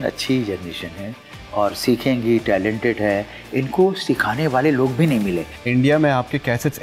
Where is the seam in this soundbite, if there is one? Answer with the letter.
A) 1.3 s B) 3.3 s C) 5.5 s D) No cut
C